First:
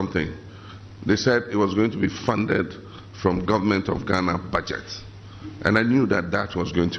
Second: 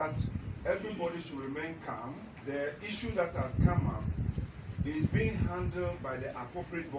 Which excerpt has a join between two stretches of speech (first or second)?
second